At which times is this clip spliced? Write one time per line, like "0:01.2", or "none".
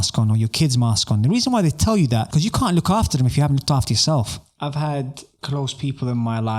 0:04.4
0:05.3